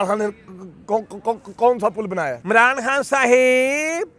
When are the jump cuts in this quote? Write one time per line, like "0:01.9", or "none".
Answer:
0:02.4

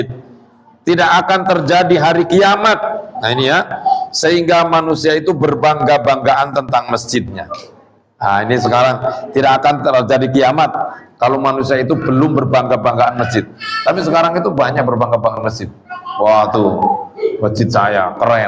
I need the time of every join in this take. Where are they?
none

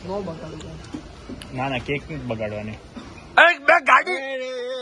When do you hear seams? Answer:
none

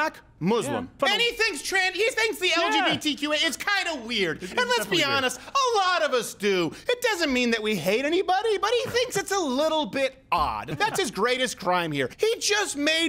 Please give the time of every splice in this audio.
0:01.0
0:10.7
0:12.1

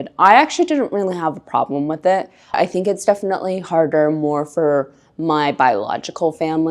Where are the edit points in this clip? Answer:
0:02.5

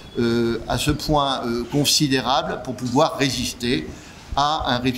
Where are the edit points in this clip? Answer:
none

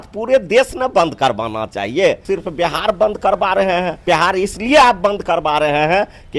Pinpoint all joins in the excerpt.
0:02.2
0:04.0

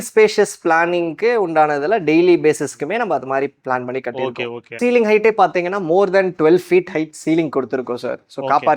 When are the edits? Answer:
0:04.6

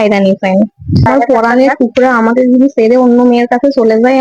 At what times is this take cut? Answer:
0:01.1

